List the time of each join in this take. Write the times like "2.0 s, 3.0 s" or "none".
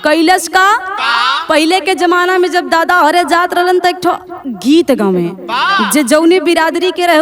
none